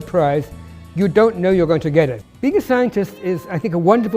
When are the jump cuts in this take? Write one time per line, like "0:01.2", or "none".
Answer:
0:02.2